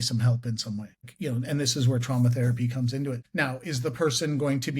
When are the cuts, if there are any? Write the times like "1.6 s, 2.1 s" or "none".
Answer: 1.1 s, 3.2 s